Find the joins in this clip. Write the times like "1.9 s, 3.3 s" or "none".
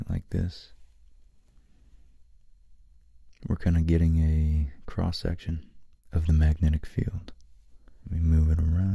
3.3 s, 8.1 s